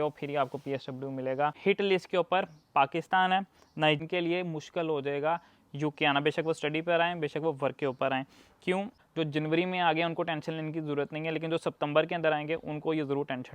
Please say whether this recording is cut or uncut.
cut